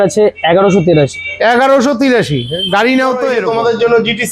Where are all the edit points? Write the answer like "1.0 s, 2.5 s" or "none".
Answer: 3.4 s